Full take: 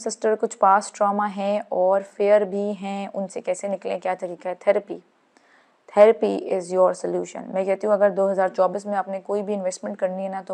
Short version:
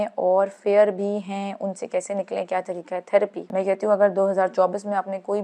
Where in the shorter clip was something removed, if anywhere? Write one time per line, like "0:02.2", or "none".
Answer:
0:03.4